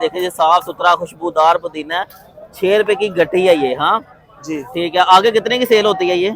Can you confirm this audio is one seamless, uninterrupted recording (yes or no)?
yes